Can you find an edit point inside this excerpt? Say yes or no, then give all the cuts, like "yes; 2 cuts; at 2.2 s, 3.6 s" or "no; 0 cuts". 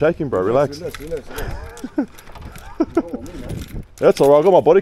no; 0 cuts